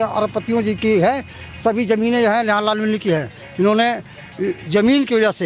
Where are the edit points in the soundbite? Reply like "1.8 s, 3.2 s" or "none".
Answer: none